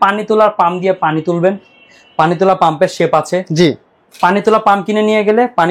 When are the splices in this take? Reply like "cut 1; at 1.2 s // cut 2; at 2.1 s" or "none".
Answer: none

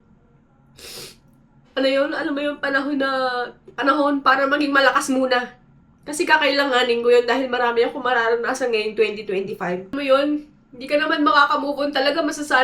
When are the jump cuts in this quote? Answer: cut 1; at 9.9 s

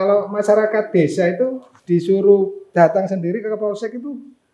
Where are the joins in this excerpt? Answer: cut 1; at 1.7 s // cut 2; at 2.6 s

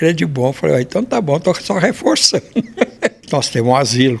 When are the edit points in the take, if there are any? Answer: cut 1; at 3.2 s

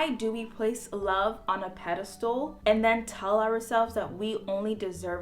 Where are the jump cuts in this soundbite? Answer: cut 1; at 2.5 s

